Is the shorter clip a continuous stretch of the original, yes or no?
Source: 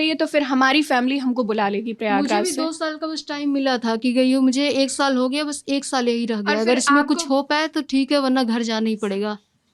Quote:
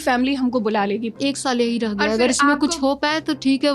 no